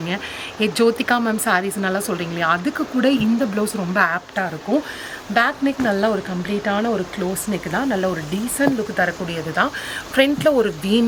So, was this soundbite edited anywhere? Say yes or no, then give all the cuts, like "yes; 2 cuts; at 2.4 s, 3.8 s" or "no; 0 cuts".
no; 0 cuts